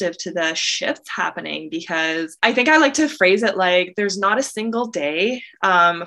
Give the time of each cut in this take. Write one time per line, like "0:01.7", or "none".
0:02.4